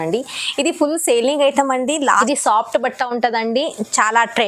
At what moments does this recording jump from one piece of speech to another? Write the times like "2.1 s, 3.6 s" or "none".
2.1 s